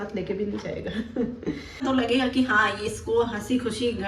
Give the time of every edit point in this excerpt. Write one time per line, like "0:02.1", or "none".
0:01.8